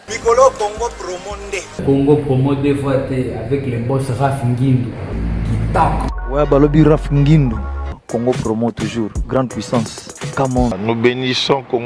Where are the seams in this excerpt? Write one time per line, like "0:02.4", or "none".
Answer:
0:01.6
0:05.1
0:06.1